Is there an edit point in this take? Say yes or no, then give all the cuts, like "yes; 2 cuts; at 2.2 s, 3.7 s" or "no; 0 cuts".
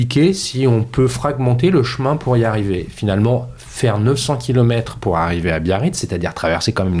no; 0 cuts